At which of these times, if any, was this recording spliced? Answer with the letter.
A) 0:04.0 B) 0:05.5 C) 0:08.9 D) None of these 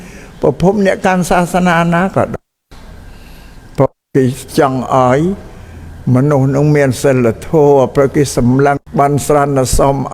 C